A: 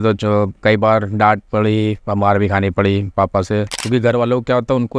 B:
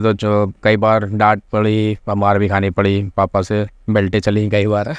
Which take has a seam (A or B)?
A